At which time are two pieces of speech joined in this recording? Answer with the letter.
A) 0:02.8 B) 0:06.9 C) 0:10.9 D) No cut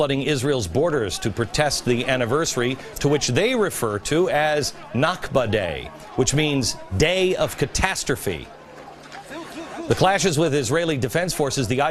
D